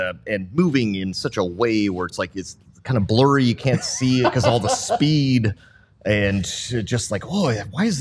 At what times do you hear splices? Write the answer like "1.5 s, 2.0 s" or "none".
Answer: none